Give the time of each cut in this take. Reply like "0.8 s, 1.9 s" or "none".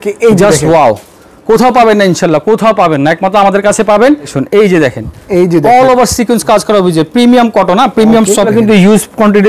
4.3 s, 8.5 s